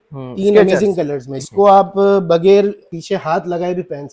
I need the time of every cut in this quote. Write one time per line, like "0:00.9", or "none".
0:01.3
0:02.9